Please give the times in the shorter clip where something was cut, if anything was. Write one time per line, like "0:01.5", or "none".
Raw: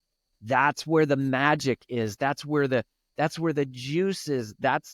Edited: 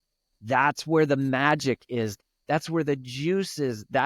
0:02.2